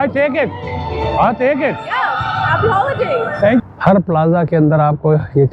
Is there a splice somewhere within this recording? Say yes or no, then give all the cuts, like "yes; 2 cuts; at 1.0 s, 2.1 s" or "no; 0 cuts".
yes; 1 cut; at 3.6 s